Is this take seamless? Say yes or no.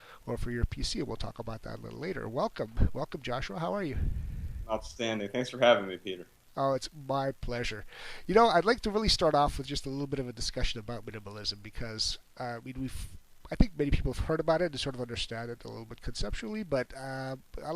no